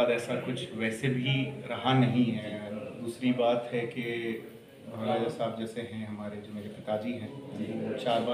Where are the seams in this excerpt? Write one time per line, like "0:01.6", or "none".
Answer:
none